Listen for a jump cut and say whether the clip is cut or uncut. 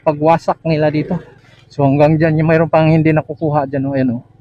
cut